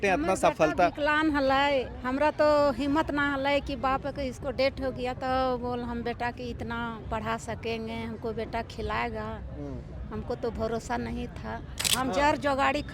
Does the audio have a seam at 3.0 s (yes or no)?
no